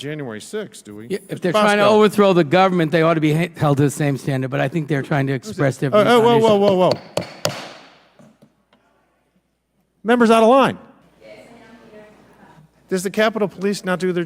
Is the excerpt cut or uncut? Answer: cut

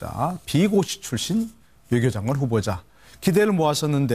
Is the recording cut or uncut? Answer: uncut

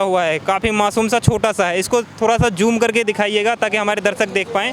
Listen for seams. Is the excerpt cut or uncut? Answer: uncut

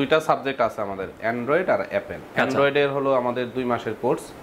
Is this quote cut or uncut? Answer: cut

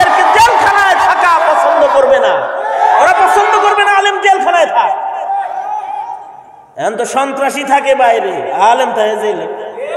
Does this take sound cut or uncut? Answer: uncut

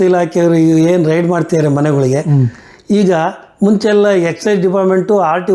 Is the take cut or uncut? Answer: uncut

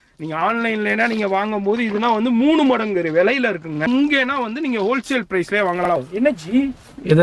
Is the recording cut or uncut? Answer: cut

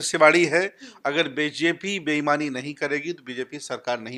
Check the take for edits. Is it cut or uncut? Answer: uncut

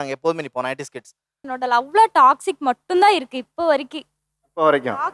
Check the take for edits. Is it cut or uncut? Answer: cut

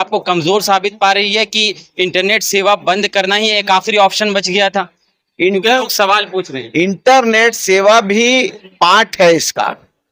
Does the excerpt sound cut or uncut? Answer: uncut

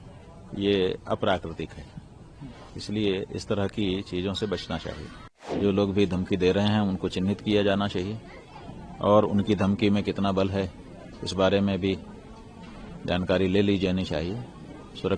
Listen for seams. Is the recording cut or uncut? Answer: cut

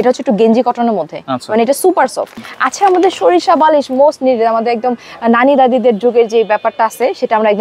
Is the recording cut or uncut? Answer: cut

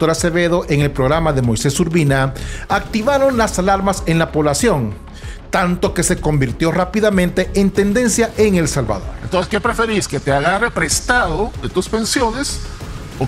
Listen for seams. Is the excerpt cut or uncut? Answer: cut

